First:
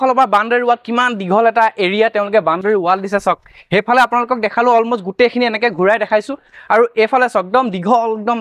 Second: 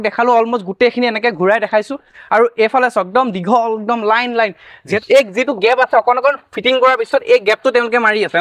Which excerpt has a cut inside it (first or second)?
second